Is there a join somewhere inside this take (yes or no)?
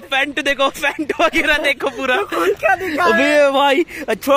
no